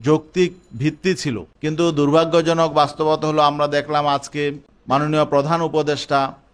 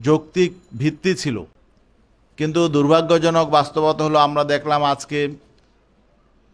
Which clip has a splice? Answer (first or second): first